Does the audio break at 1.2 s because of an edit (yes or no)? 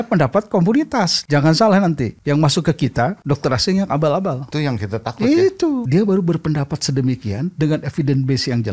yes